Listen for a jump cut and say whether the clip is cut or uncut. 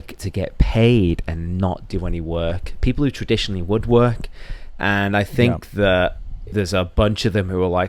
cut